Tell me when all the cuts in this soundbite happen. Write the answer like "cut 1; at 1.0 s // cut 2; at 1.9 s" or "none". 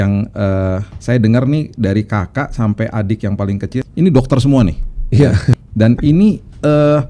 cut 1; at 0.9 s // cut 2; at 3.8 s // cut 3; at 5.6 s